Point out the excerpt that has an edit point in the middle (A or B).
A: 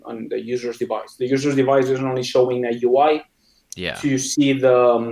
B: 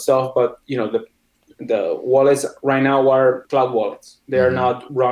B